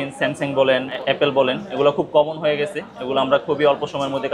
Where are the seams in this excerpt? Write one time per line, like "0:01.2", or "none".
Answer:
0:00.9